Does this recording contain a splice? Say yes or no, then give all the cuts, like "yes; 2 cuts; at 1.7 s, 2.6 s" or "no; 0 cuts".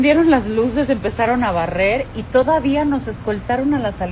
no; 0 cuts